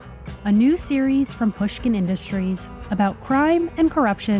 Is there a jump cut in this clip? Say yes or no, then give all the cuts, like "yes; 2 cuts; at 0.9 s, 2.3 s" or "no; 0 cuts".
no; 0 cuts